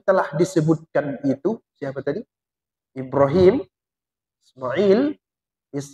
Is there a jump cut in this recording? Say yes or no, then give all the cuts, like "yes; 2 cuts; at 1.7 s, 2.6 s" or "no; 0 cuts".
no; 0 cuts